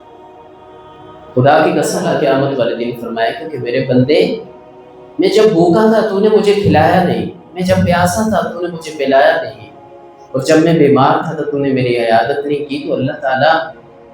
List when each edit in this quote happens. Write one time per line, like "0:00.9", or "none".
0:02.1